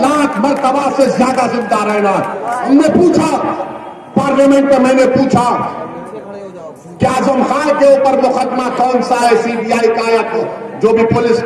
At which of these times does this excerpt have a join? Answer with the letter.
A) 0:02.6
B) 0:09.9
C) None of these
A